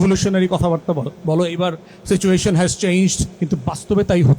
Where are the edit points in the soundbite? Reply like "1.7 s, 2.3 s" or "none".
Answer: 1.1 s, 3.3 s